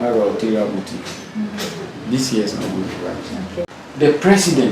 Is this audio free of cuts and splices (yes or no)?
no